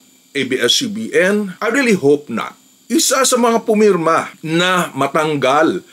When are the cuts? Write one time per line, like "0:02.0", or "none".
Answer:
0:01.5
0:02.8